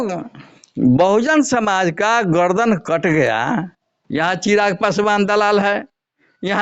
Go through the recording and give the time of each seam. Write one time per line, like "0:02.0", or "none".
0:04.1